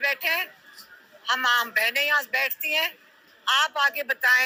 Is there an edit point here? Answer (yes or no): no